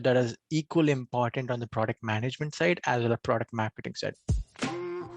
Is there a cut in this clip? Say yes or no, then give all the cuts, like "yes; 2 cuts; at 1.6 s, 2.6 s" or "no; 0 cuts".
yes; 1 cut; at 4.2 s